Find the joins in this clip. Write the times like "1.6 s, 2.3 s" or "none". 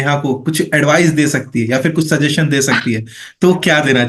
none